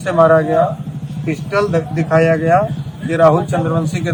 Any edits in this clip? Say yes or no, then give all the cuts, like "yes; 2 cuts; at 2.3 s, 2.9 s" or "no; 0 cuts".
no; 0 cuts